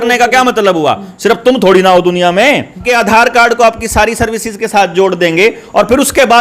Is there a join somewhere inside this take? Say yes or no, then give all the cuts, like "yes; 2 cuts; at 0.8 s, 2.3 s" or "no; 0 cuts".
yes; 1 cut; at 2.8 s